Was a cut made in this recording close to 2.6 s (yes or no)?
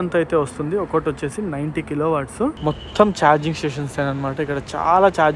yes